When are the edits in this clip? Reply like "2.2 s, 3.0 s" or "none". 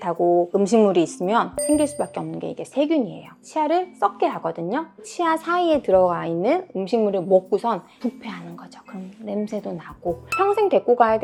none